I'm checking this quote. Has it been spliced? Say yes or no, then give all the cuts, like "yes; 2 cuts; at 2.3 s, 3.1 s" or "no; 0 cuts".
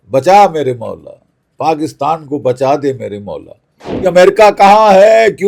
yes; 1 cut; at 4.0 s